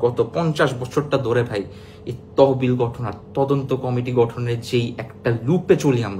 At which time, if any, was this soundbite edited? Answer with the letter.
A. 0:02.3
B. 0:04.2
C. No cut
C